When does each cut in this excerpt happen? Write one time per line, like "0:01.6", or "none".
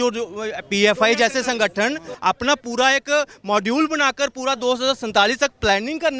0:02.1

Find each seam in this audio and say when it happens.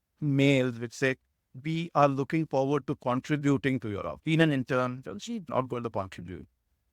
0:04.1
0:05.5

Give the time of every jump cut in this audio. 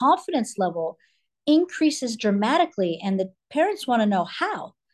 none

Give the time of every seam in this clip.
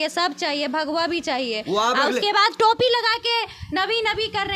none

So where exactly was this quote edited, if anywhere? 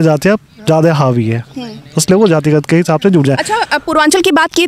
none

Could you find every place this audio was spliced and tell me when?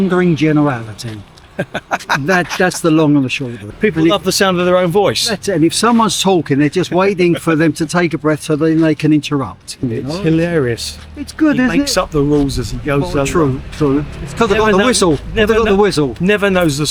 0:03.6
0:09.8

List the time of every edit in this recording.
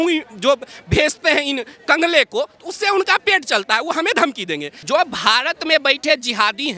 0:04.7

